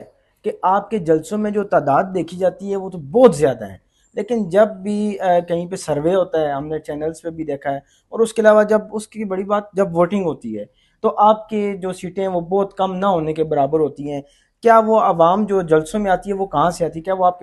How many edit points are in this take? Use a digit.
0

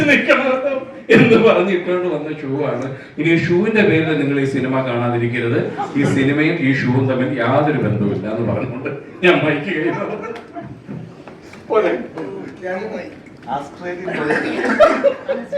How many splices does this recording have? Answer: 0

